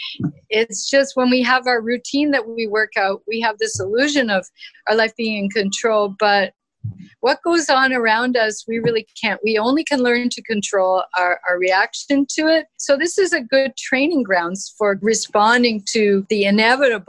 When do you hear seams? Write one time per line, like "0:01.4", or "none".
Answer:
0:12.7
0:15.0
0:16.2